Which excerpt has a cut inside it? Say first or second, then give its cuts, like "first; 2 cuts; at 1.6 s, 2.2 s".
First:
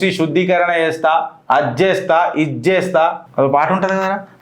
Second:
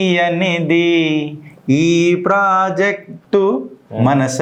first; 2 cuts; at 1.3 s, 3.2 s